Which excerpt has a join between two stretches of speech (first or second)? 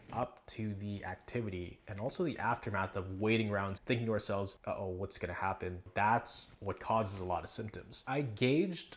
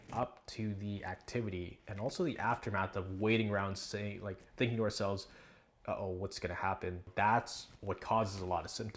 first